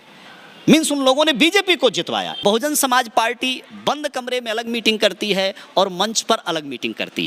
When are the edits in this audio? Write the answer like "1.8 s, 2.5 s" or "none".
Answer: 2.3 s